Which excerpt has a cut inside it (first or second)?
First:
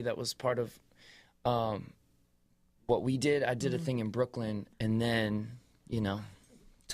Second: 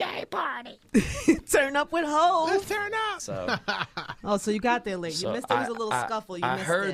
first